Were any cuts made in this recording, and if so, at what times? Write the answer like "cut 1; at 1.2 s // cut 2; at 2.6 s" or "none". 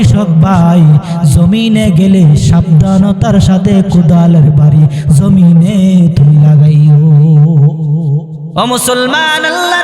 cut 1; at 8.4 s